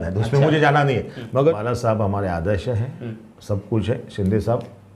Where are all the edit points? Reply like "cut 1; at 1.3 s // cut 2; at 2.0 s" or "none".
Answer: cut 1; at 1.5 s